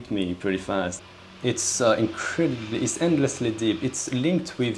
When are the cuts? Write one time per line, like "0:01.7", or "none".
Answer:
0:01.0